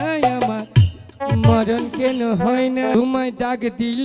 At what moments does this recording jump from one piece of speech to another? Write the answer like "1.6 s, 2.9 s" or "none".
2.9 s